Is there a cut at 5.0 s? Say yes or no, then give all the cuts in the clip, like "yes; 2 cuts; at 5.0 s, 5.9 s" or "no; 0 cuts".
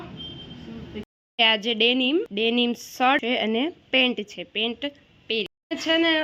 no; 3 cuts; at 1.1 s, 2.3 s, 3.2 s